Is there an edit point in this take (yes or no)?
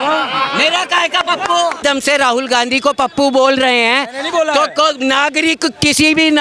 yes